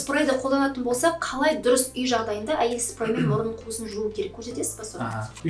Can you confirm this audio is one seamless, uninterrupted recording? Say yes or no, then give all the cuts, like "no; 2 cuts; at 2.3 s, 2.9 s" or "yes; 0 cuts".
yes; 0 cuts